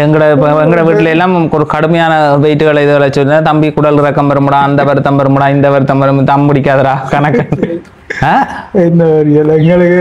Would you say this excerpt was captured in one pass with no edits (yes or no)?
yes